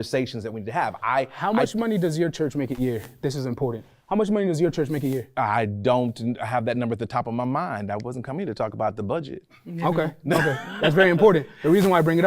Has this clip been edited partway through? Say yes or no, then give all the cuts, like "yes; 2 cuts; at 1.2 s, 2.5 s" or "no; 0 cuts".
yes; 1 cut; at 1.0 s